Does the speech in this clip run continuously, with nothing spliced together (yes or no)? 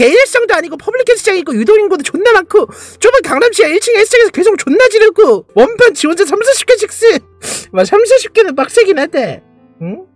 yes